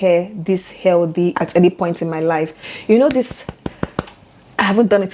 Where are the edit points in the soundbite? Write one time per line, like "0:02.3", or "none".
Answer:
0:02.6